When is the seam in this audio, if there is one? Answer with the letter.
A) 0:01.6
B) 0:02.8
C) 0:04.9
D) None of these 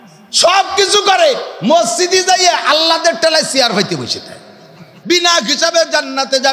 C